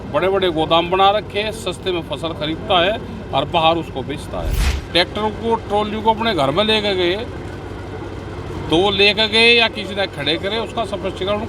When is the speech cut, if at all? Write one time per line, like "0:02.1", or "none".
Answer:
0:04.6